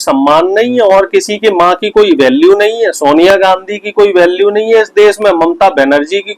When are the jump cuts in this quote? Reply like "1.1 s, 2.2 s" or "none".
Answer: none